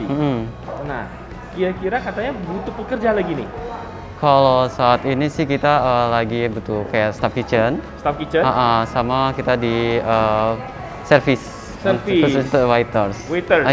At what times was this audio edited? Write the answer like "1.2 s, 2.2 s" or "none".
none